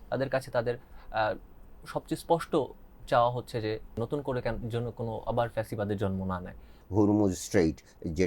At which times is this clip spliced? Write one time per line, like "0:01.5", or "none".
0:04.0
0:06.7